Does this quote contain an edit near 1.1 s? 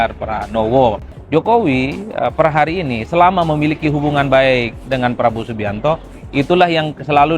yes; 1 cut; at 1.1 s

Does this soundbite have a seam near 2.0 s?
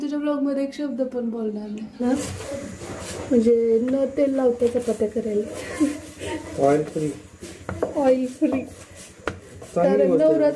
yes; 1 cut; at 2.0 s

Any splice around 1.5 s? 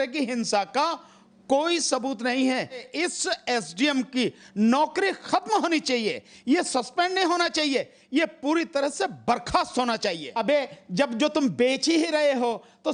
no; 2 cuts; at 2.9 s, 10.3 s

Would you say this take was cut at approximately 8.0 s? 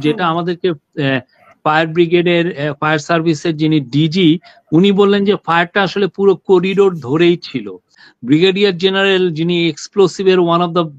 yes; 1 cut; at 8.0 s

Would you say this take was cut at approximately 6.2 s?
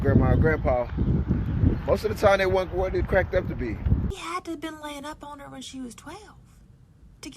no; 1 cut; at 4.1 s

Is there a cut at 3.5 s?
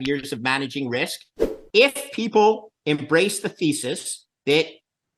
no; 1 cut; at 1.5 s

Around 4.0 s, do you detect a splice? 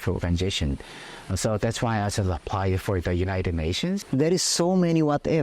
yes; 1 cut; at 4.0 s

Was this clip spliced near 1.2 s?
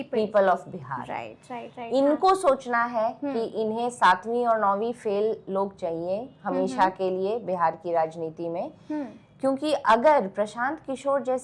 no; 0 cuts

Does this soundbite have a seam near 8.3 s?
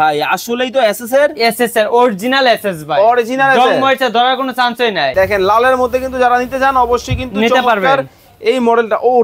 no; 1 cut; at 5.1 s

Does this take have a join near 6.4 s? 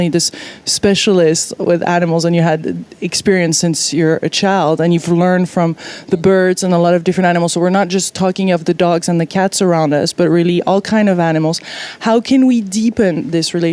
no; 1 cut; at 11.1 s

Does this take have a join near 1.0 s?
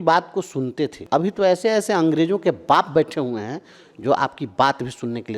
yes; 1 cut; at 1.0 s

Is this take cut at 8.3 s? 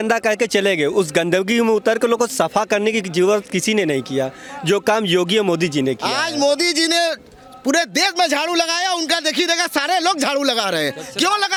no; 0 cuts

